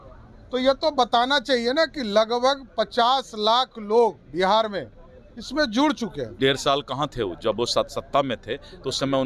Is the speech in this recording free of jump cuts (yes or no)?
no